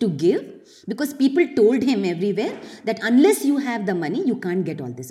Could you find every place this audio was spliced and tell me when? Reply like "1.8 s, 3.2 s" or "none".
none